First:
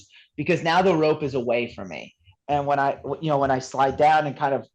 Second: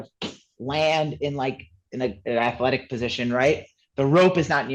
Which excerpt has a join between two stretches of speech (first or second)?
first